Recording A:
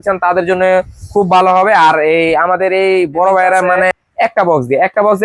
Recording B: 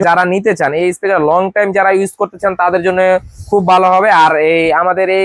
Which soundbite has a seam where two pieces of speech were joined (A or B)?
A